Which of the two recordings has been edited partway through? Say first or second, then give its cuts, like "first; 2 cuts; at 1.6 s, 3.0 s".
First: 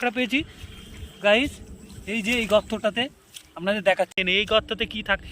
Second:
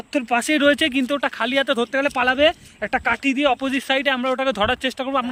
first; 1 cut; at 4.2 s